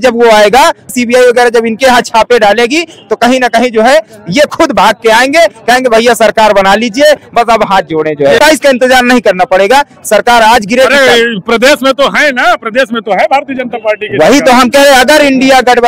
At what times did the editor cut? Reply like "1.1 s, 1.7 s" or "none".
0.9 s, 8.4 s